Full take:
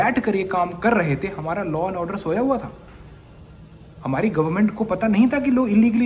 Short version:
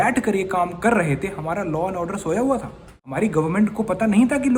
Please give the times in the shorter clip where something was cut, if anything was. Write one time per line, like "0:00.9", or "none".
0:03.1